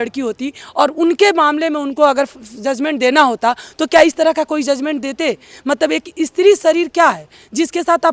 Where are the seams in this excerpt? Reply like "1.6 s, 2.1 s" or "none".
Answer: none